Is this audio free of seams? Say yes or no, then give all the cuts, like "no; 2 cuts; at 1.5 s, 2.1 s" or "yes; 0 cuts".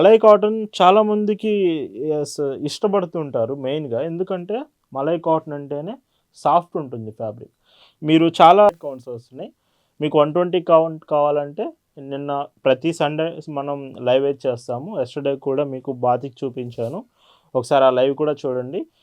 no; 1 cut; at 8.7 s